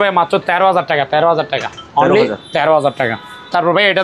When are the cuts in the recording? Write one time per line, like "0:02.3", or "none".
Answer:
none